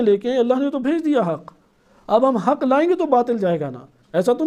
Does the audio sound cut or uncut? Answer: uncut